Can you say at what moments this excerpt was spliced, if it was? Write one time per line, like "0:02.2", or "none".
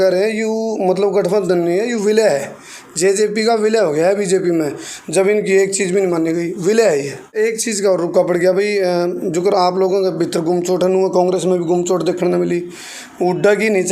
0:07.3

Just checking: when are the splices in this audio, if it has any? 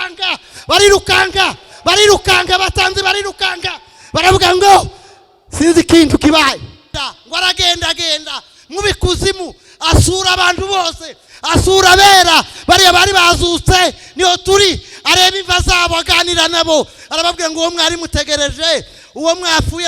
0:06.9

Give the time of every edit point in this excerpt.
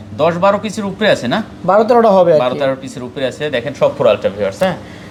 none

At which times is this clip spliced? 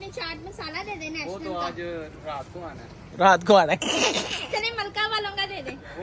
none

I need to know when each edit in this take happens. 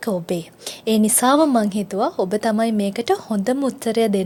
none

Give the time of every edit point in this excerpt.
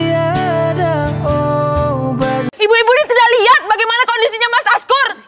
0:02.5

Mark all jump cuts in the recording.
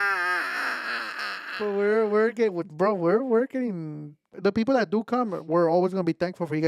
0:04.3

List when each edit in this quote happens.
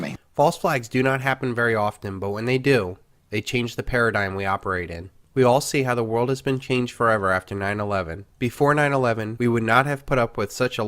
0:03.1

